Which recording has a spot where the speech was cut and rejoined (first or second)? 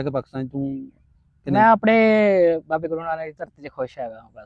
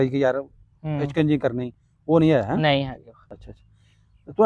second